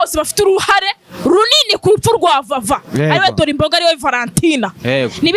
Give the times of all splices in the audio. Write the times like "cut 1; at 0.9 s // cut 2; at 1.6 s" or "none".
none